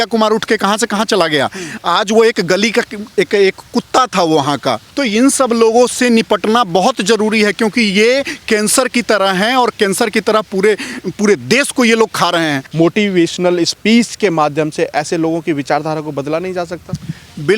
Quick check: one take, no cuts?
no; 2 cuts; at 4.9 s, 12.6 s

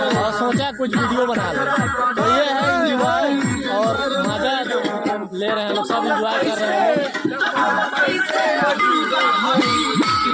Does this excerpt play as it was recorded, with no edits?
no; 1 cut; at 7.1 s

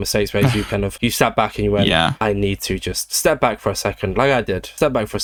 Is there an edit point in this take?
no; 0 cuts

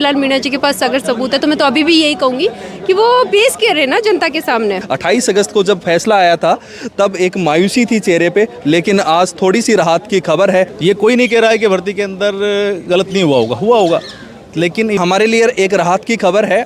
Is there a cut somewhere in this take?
yes; 3 cuts; at 4.8 s, 10.7 s, 15.0 s

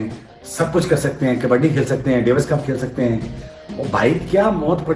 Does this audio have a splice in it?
no; 0 cuts

